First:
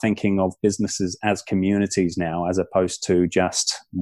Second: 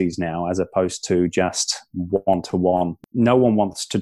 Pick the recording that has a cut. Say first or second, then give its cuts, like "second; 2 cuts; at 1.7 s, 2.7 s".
second; 1 cut; at 3.0 s